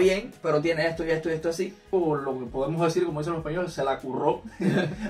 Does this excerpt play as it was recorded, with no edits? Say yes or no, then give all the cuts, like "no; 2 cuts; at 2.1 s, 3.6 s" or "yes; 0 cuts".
no; 1 cut; at 1.9 s